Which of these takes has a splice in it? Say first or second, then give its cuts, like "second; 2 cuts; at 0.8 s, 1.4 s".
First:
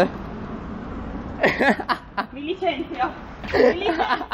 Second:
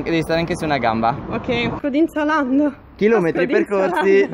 second; 1 cut; at 1.8 s